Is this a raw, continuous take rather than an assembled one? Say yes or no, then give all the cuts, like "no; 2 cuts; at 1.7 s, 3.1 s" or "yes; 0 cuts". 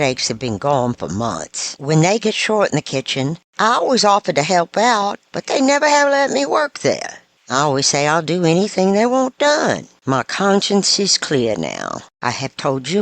no; 1 cut; at 9.9 s